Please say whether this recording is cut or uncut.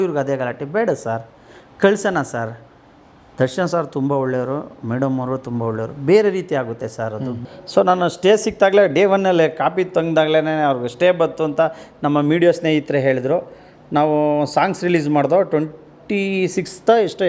cut